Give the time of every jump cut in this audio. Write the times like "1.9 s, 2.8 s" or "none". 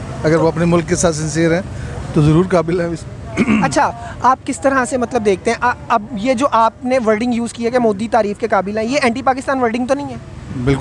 none